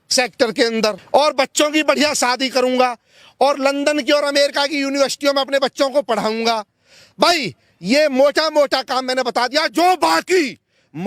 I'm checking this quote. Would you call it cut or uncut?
cut